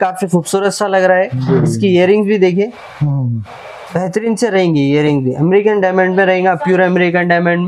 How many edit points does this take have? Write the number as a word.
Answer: zero